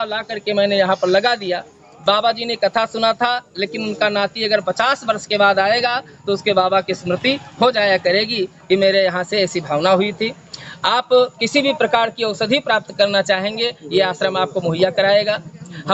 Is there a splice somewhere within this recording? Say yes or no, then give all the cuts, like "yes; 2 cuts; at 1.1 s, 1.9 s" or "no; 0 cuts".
no; 0 cuts